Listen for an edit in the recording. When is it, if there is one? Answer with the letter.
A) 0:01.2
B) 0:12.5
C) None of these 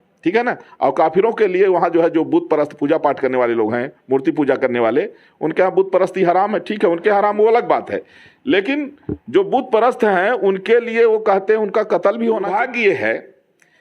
B